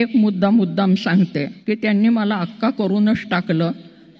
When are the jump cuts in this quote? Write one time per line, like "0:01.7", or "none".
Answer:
0:01.5